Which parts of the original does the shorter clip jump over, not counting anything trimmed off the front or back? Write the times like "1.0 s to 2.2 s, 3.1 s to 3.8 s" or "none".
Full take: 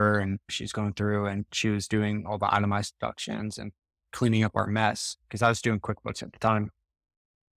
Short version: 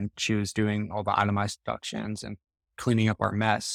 none